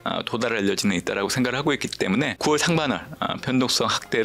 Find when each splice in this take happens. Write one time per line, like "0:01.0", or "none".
0:02.3